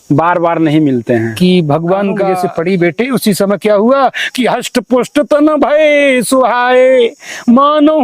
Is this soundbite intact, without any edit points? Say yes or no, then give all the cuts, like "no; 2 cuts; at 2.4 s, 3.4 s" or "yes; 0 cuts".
no; 1 cut; at 2.3 s